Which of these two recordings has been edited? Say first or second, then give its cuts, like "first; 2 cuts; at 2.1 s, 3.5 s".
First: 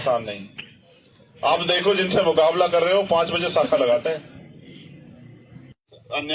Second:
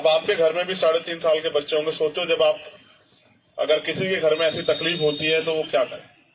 second; 1 cut; at 1.9 s